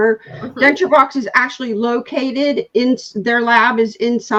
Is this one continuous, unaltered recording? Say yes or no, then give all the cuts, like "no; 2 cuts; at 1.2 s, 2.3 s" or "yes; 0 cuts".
yes; 0 cuts